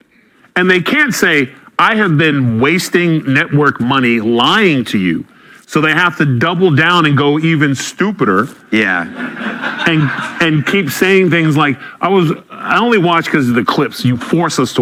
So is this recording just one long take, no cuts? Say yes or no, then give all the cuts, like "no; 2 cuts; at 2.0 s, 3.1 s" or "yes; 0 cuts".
yes; 0 cuts